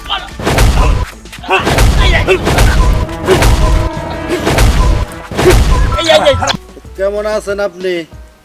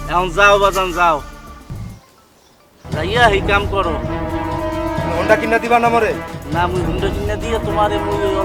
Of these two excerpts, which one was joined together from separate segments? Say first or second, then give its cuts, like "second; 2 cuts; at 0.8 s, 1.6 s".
first; 1 cut; at 6.5 s